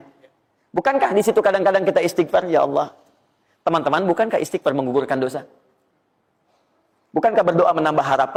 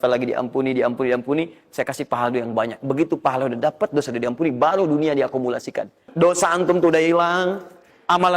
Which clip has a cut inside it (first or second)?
second